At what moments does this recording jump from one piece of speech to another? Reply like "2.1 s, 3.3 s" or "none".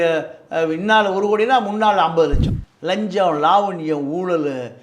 2.4 s